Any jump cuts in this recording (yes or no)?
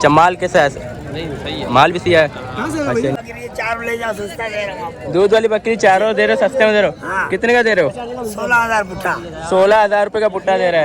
yes